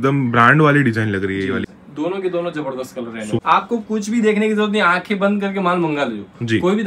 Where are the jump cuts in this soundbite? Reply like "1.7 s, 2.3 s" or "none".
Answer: 1.8 s, 3.4 s